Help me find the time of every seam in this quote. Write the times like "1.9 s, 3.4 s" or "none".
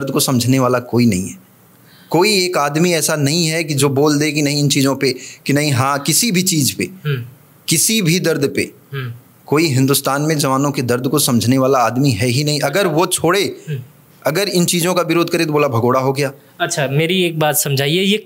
none